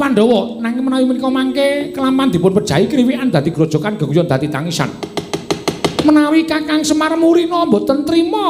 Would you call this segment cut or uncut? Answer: uncut